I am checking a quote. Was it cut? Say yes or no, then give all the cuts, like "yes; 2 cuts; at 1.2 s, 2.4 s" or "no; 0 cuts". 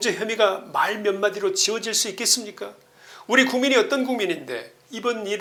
no; 0 cuts